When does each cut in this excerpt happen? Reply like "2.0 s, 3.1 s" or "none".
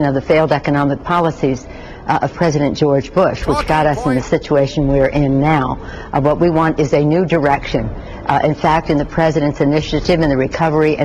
3.8 s, 6.2 s